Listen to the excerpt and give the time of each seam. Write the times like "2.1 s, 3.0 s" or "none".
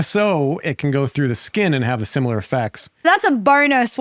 3.0 s